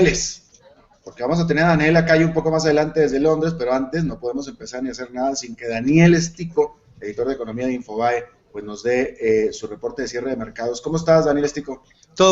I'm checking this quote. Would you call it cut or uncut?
uncut